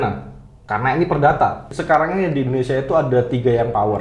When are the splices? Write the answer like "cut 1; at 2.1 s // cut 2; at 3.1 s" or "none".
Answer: cut 1; at 1.7 s